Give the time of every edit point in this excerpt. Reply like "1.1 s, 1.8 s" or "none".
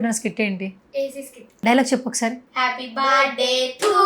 1.4 s